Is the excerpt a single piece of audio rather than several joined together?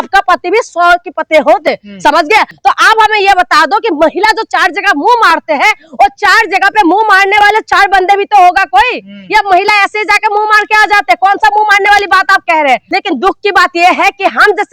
no; 2 cuts; at 2.5 s, 12.8 s

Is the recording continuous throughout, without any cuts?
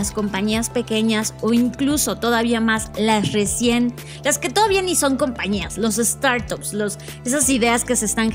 yes; 0 cuts

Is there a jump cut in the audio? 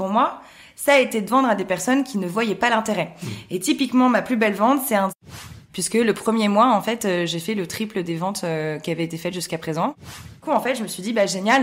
yes; 2 cuts; at 5.3 s, 10.4 s

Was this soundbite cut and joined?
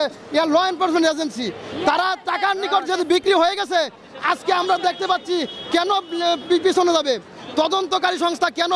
no; 0 cuts

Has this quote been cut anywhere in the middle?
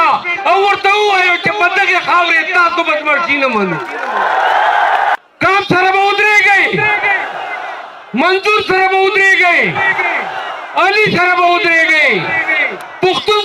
yes; 1 cut; at 5.2 s

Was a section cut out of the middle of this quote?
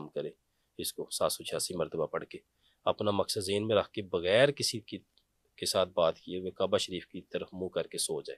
no; 0 cuts

